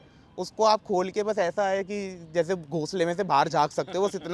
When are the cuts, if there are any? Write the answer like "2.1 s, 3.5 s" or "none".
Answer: none